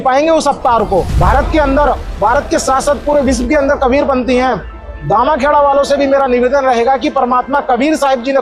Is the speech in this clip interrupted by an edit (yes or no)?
yes